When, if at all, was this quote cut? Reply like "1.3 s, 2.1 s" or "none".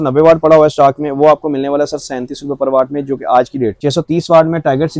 3.8 s